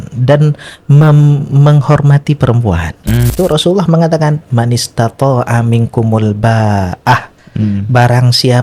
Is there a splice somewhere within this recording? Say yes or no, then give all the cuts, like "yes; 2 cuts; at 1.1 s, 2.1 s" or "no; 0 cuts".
yes; 1 cut; at 3.3 s